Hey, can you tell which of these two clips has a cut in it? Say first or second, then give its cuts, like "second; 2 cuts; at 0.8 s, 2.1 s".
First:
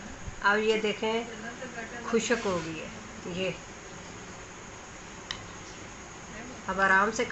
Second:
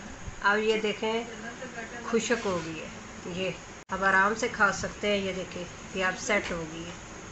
second; 1 cut; at 3.8 s